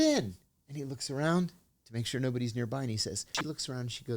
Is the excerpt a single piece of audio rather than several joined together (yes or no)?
no